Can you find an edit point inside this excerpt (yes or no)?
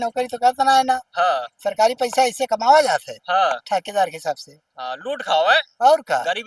no